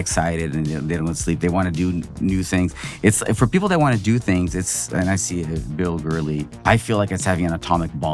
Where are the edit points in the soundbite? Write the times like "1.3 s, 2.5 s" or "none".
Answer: 6.5 s